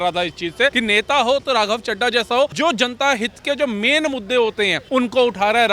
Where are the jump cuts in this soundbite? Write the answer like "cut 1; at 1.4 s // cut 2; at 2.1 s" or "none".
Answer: cut 1; at 0.7 s // cut 2; at 2.5 s // cut 3; at 4.8 s